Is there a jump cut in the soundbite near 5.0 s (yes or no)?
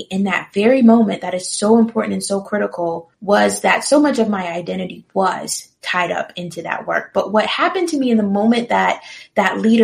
no